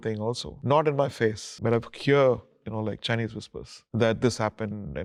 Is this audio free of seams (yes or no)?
yes